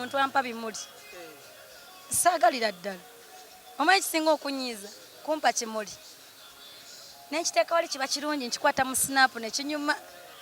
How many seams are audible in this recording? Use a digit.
0